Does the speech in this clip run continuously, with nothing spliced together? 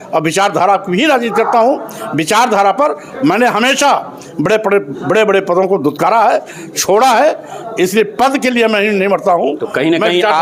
yes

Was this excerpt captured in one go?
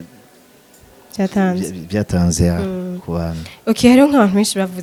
yes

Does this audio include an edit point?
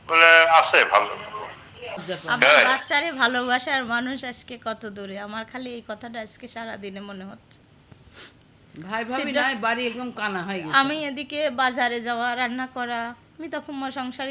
yes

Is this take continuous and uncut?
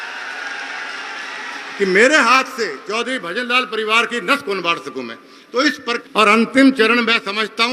no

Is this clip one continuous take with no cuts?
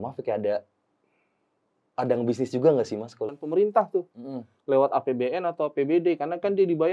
no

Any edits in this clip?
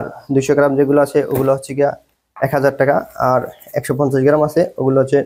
no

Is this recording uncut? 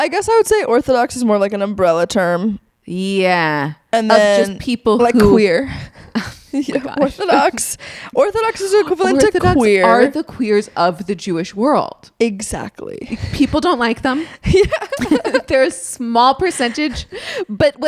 yes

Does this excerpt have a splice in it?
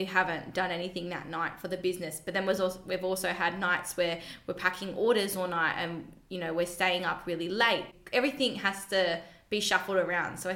yes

